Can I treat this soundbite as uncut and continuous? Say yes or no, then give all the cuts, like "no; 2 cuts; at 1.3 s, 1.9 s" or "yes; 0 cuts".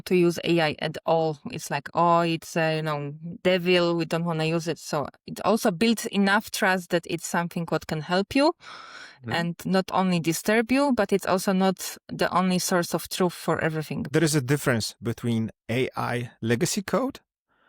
no; 2 cuts; at 9.6 s, 14.1 s